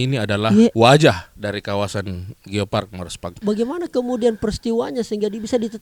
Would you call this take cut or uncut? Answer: cut